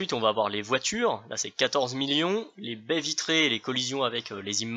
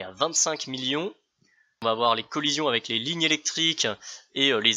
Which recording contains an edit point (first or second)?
second